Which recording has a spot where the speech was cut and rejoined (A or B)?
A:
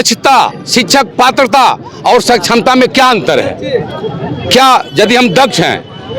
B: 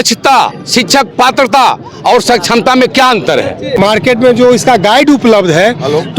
B